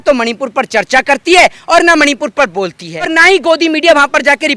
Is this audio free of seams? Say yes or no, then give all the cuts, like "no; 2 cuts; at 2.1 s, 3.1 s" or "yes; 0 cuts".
no; 1 cut; at 3.1 s